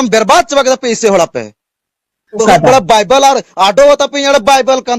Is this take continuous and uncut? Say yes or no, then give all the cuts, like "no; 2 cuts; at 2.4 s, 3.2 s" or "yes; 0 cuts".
no; 1 cut; at 2.4 s